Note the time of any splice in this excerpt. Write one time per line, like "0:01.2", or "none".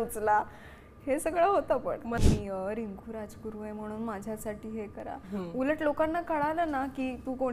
0:02.2